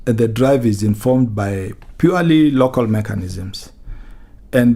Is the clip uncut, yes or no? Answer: yes